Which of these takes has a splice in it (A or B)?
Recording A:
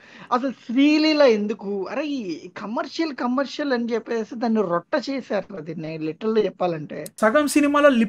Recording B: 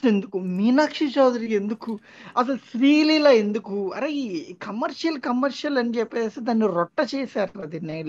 A